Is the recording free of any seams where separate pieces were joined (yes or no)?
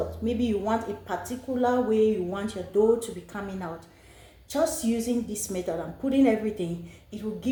yes